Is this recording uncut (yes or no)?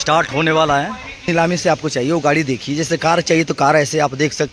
no